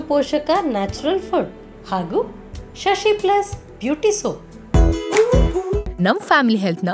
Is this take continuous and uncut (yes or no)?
no